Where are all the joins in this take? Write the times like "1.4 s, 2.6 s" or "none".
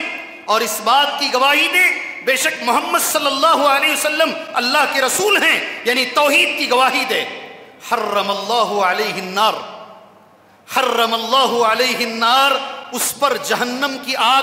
none